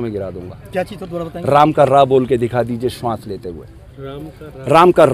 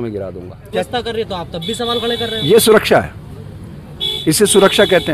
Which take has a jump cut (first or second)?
second